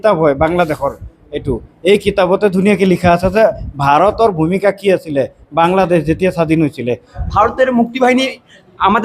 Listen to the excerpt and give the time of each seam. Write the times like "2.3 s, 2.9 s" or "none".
7.1 s